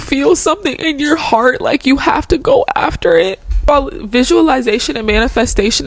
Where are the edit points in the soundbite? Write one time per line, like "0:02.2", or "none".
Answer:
0:03.7